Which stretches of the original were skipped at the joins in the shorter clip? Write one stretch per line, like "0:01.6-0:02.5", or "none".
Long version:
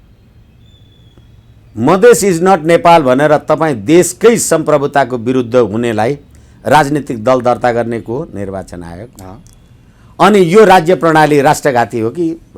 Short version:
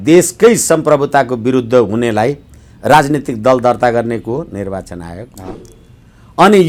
none